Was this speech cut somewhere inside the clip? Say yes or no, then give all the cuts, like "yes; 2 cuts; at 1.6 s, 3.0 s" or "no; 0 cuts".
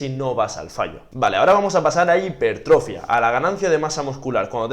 yes; 1 cut; at 1.0 s